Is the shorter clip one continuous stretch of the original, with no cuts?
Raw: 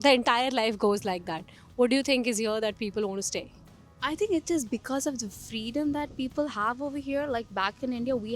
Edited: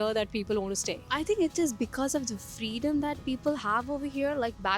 no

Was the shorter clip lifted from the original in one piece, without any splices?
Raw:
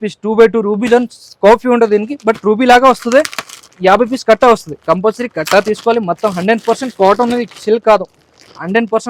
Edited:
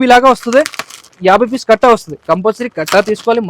yes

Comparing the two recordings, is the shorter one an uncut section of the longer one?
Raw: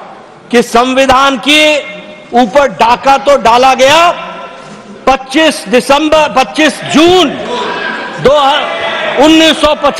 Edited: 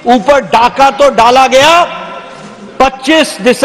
yes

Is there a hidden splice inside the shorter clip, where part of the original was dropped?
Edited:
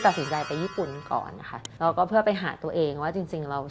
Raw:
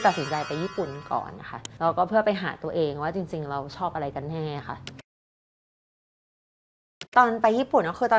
no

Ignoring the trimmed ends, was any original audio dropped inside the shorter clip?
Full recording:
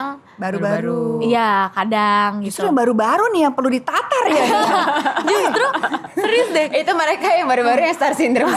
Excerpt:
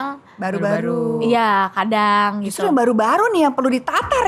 no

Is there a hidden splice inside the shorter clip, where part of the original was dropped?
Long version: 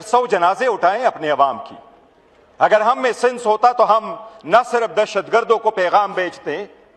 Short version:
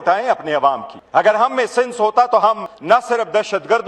yes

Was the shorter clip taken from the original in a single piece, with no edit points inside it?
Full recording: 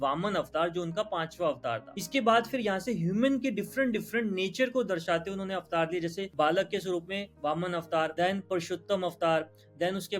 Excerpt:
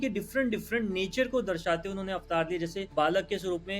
yes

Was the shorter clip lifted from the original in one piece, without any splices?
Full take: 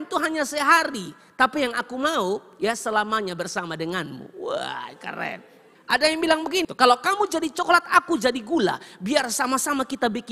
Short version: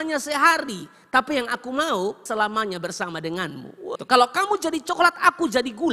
no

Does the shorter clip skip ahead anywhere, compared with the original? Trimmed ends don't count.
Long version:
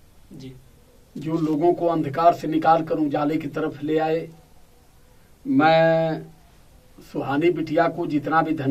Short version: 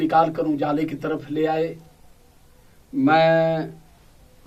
no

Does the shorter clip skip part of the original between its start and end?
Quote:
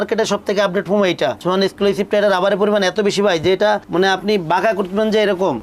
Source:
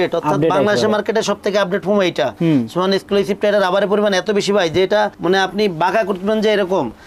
yes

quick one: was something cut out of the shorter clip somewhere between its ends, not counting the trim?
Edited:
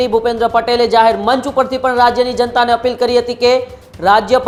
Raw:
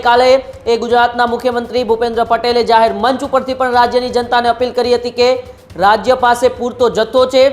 no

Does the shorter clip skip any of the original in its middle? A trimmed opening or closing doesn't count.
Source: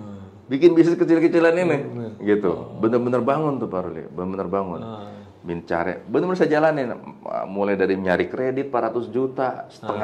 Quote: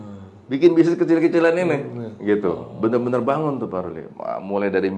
yes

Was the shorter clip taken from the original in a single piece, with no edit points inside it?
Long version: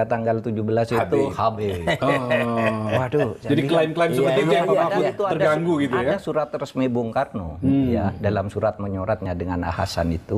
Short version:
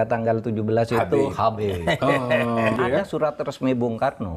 no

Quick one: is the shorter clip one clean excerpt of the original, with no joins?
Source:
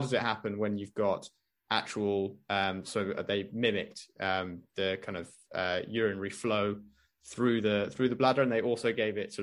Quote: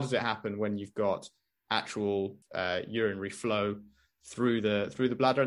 no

